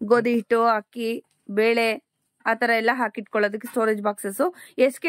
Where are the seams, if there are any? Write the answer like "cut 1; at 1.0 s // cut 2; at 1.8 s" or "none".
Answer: none